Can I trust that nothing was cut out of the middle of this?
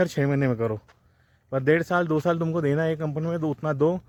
yes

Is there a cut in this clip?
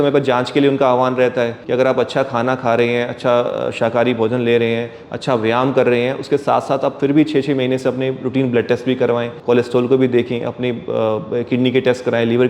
yes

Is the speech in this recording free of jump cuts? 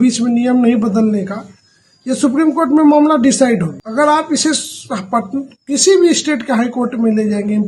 no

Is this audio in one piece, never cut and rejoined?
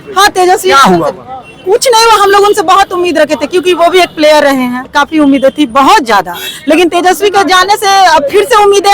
no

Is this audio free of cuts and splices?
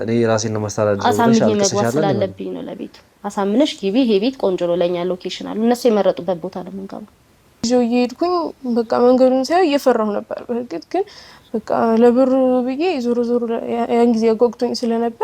no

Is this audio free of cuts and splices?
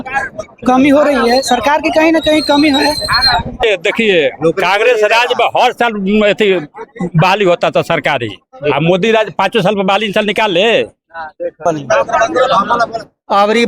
no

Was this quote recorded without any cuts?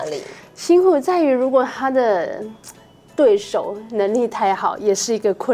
yes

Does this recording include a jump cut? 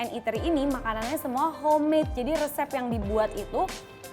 no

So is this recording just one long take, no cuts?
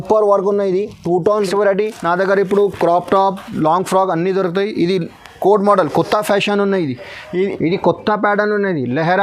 no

